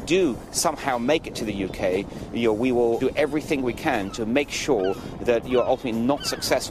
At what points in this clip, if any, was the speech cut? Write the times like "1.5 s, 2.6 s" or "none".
3.0 s, 4.1 s